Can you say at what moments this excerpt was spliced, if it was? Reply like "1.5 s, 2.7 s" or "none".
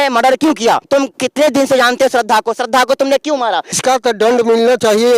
1.2 s, 3.8 s